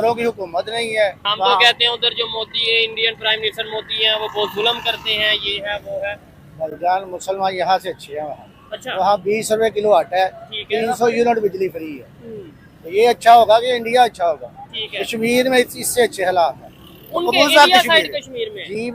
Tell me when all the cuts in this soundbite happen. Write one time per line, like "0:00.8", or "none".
0:01.3

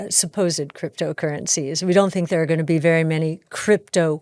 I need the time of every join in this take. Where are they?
none

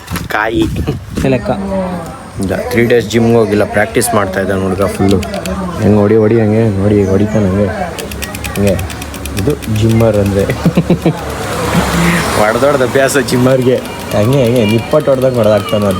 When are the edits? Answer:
0:01.3

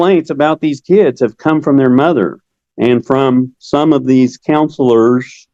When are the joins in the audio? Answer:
none

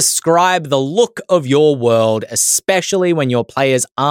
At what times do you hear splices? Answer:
none

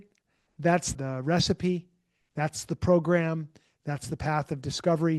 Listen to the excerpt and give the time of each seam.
0:00.9

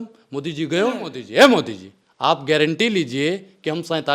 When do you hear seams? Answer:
0:01.2

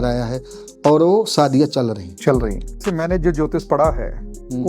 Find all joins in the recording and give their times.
0:02.8

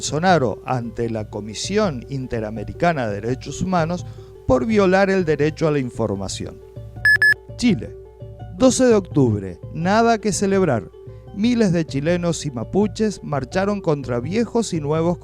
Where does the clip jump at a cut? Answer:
0:06.7

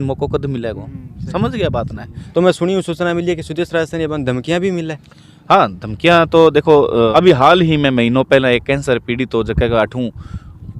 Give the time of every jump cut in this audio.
0:02.2
0:07.1

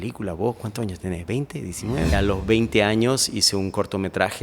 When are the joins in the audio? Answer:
0:02.1

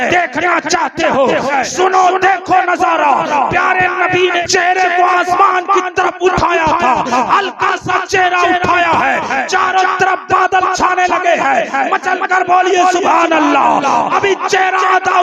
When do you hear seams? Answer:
0:01.5
0:04.4

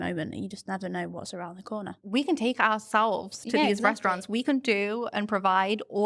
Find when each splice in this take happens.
0:02.0

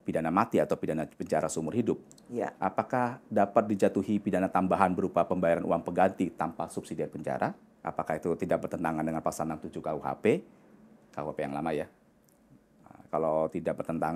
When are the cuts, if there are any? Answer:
0:07.7

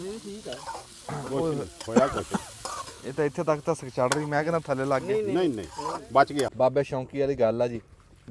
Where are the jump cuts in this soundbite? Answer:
0:06.5

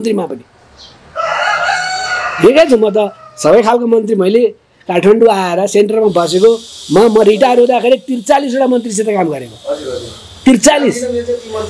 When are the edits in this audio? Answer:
none

